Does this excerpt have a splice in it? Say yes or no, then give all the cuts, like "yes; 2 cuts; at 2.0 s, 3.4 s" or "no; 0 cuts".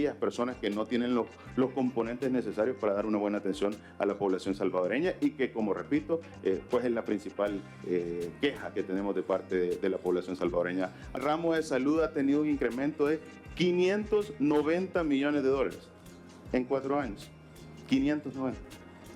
yes; 1 cut; at 11.2 s